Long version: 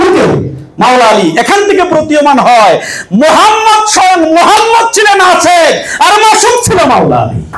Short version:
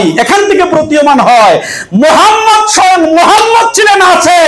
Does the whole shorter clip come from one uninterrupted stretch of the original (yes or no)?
yes